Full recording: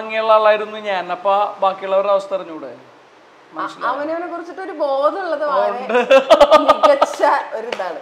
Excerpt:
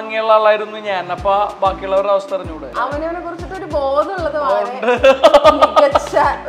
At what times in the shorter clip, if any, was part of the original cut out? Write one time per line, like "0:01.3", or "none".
0:02.7